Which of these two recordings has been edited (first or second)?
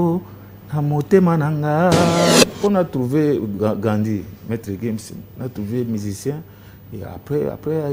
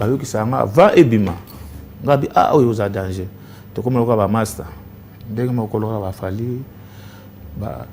first